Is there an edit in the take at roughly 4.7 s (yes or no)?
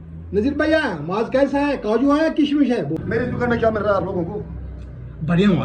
no